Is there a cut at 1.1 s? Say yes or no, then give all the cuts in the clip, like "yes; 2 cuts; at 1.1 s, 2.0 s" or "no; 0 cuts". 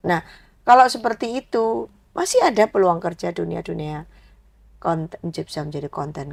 no; 0 cuts